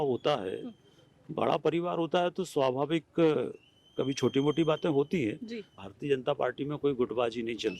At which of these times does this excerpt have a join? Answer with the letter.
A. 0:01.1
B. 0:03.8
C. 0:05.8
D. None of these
C